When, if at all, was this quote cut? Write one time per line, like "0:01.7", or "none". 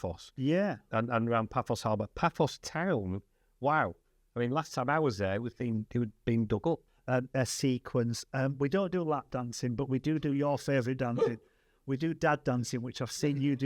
0:06.9